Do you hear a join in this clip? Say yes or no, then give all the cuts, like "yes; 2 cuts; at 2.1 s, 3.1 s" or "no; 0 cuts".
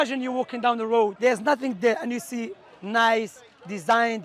yes; 1 cut; at 1.1 s